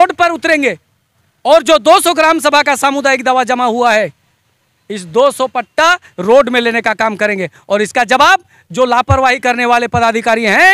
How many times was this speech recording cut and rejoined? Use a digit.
0